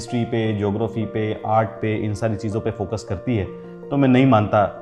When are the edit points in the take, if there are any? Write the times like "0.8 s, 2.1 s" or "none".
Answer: none

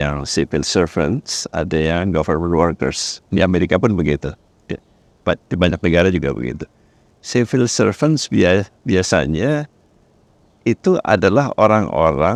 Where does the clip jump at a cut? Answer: none

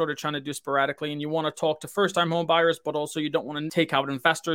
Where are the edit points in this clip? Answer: 3.6 s

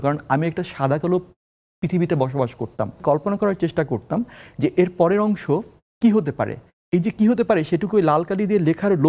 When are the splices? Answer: 3.0 s

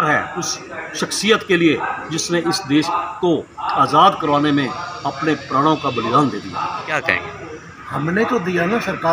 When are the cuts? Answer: 7.0 s

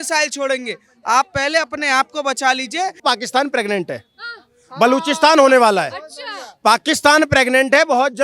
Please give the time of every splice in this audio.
3.0 s

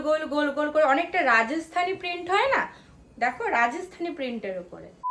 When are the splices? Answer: none

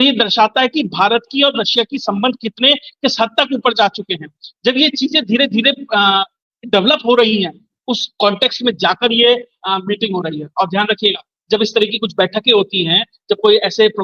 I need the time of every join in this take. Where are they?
none

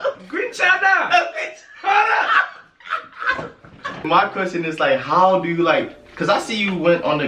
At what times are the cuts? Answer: 4.0 s

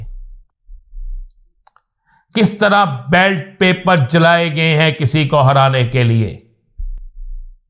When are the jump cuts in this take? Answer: none

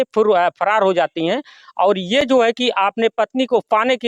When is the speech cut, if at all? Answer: none

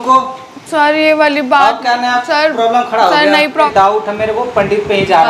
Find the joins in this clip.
3.5 s

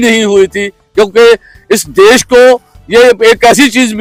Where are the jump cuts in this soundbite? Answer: none

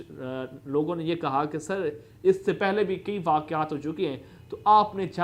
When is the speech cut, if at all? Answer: none

